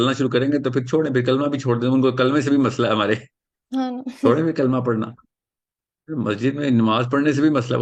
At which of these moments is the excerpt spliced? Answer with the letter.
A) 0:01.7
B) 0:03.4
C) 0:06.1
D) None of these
D